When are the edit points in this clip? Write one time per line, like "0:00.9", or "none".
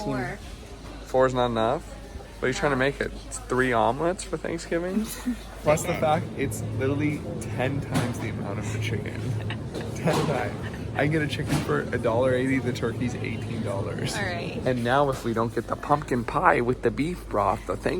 0:05.6
0:14.6